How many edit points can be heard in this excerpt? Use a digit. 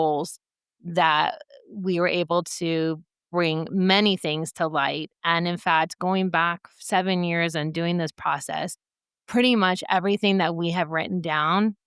0